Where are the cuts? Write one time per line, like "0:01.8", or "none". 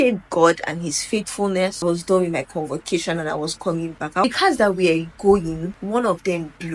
0:01.8
0:04.2
0:05.7

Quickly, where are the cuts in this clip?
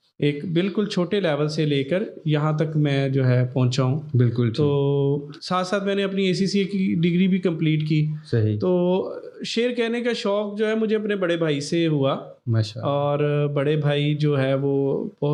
none

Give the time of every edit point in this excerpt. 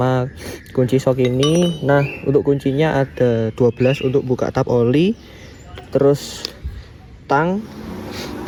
none

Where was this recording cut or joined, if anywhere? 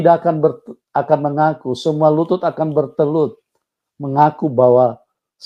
none

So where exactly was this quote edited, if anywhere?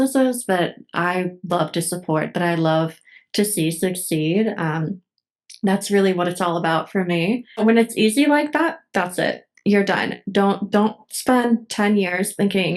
0:07.6

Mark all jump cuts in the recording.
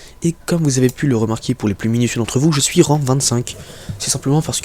none

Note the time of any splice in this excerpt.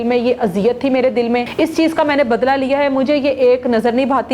0:01.5

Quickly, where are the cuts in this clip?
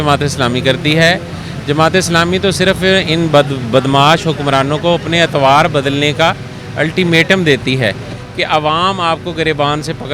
none

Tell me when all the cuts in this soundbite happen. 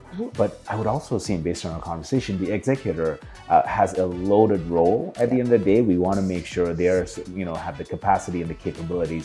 none

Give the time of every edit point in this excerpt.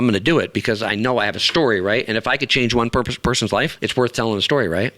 0:03.8

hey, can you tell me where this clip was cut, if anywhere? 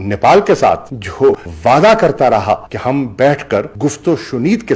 0:01.5

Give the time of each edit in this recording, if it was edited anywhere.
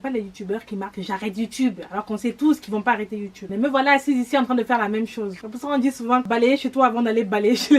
0:03.4
0:05.5
0:06.2

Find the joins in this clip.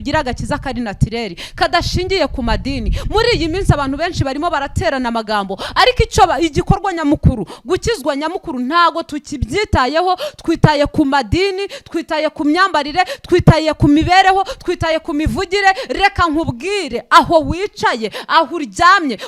none

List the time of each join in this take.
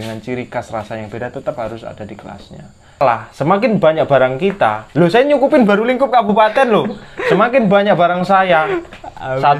0:03.0

